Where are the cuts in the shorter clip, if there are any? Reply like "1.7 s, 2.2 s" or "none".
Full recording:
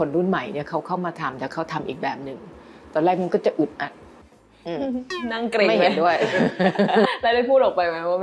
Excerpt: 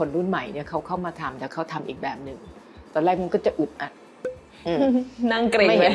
none